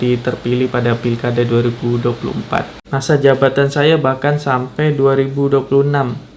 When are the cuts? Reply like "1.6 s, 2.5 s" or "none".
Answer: 2.9 s